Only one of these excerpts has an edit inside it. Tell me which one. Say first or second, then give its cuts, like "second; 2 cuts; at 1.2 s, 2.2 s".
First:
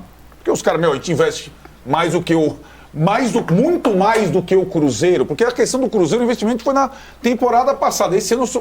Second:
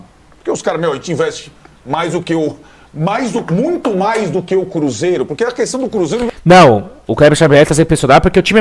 first; 1 cut; at 6.3 s